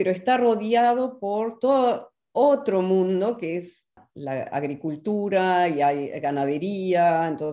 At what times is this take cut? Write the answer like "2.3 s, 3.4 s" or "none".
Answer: 4.0 s